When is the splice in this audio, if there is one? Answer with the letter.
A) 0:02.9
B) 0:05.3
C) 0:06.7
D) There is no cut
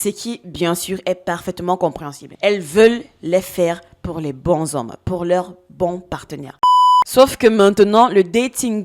C